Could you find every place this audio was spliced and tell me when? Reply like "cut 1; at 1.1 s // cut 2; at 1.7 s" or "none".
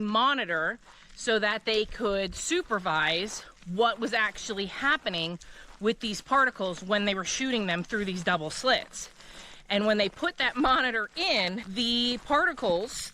cut 1; at 11.7 s